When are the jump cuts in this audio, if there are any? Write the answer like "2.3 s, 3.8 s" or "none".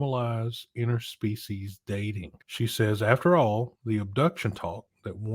2.4 s, 3.8 s